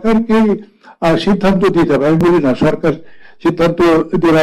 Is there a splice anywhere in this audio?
no; 0 cuts

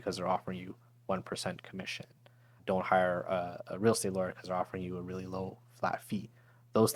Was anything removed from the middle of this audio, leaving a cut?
no; 0 cuts

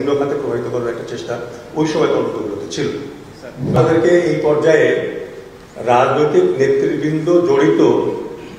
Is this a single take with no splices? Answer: no; 1 cut; at 3.8 s

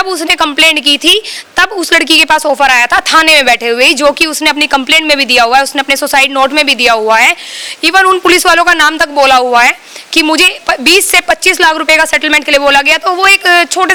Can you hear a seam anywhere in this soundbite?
no; 0 cuts

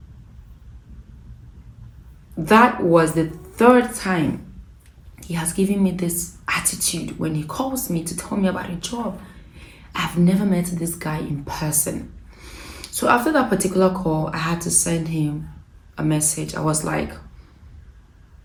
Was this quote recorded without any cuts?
yes; 0 cuts

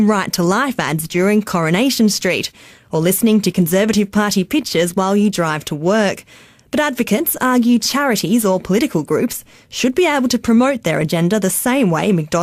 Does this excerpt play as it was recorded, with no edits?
yes; 0 cuts

